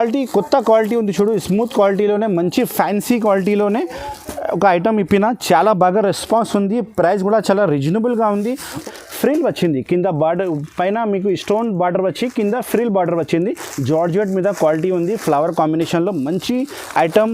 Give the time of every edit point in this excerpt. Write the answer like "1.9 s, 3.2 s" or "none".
8.8 s